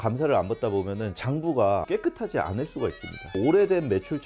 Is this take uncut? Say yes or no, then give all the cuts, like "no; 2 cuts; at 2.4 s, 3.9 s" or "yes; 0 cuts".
no; 2 cuts; at 1.8 s, 3.4 s